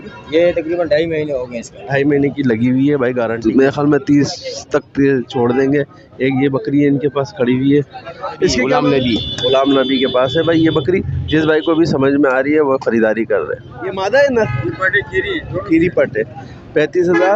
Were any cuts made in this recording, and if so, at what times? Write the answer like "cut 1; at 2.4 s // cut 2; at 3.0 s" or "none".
cut 1; at 3.4 s // cut 2; at 8.7 s // cut 3; at 13.9 s